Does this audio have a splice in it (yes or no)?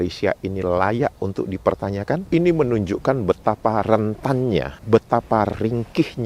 yes